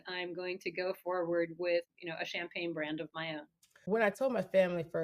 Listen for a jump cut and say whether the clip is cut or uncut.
cut